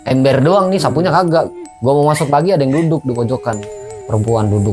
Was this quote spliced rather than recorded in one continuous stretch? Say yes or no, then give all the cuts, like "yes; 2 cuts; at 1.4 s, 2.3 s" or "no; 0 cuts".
yes; 2 cuts; at 1.6 s, 3.7 s